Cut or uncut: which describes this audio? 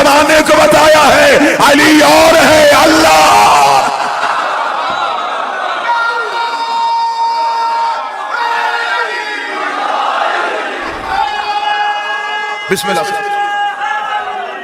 uncut